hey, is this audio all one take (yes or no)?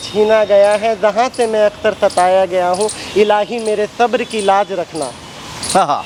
yes